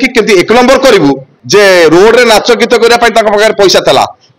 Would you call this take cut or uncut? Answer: cut